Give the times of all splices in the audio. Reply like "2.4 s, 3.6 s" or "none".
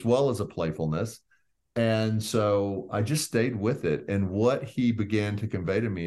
none